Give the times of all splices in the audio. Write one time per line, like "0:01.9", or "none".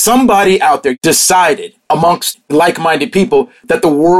0:01.0
0:02.1